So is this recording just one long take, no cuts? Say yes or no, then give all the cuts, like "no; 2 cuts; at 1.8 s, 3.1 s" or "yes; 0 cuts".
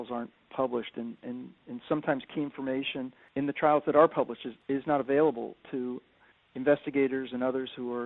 yes; 0 cuts